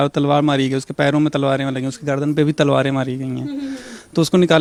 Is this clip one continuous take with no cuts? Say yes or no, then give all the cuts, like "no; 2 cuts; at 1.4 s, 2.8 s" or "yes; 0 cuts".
yes; 0 cuts